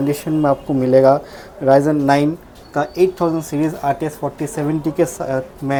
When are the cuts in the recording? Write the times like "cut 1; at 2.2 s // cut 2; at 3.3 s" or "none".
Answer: none